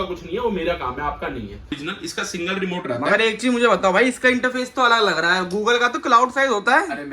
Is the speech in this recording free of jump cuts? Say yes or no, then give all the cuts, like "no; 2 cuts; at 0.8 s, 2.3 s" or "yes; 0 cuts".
no; 1 cut; at 1.8 s